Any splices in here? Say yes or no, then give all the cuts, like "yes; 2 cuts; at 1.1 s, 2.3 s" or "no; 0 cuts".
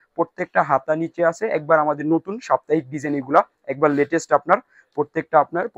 no; 0 cuts